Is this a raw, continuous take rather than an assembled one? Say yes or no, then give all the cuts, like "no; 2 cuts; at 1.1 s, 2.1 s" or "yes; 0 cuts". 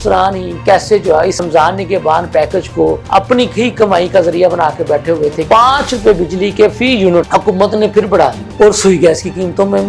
no; 5 cuts; at 1.5 s, 3.0 s, 5.4 s, 7.3 s, 8.4 s